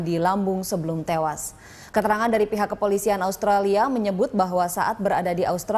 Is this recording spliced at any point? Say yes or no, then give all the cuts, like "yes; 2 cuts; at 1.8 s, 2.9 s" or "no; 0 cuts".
yes; 1 cut; at 3.2 s